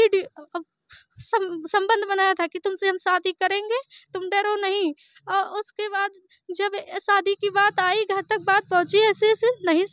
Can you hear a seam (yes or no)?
no